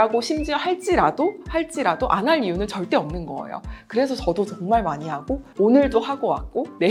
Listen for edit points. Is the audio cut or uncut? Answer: uncut